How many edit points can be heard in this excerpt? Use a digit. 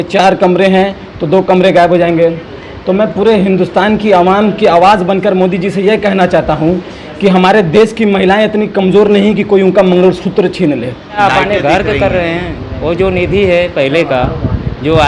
1